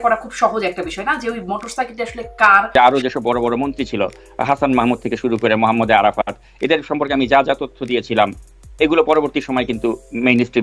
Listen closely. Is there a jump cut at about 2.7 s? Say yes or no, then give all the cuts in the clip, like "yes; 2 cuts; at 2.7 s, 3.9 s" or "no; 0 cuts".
yes; 1 cut; at 2.7 s